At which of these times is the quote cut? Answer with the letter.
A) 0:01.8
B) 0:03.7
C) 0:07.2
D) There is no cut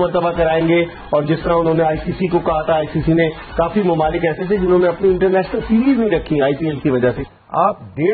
C